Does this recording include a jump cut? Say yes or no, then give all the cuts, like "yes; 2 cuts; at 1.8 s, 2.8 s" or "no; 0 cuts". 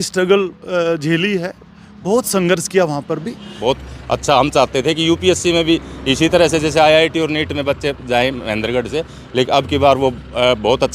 yes; 1 cut; at 3.5 s